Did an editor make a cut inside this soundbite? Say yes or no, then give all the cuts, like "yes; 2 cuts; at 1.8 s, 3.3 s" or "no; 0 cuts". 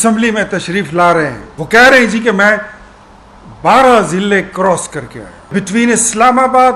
yes; 2 cuts; at 1.5 s, 5.5 s